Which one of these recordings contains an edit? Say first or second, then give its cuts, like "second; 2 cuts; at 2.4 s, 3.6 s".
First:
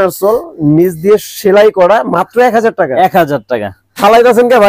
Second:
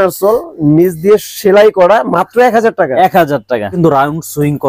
second; 1 cut; at 3.7 s